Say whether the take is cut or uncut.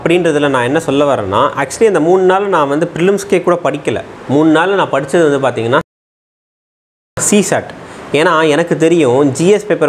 uncut